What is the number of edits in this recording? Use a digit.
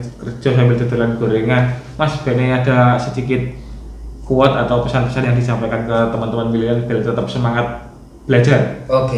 0